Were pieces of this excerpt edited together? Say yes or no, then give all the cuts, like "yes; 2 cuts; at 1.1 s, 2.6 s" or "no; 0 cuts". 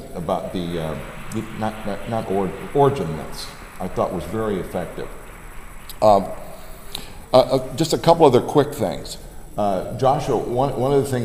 no; 0 cuts